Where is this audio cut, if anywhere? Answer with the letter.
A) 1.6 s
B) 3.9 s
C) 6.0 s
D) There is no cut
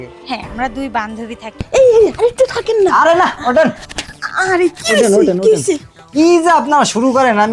A